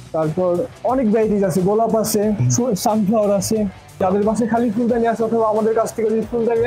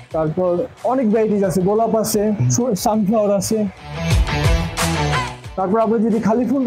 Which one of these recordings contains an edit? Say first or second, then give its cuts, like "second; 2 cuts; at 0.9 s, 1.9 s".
first; 1 cut; at 4.0 s